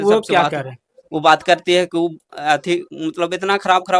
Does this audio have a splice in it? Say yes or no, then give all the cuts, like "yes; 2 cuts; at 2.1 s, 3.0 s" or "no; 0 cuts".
no; 0 cuts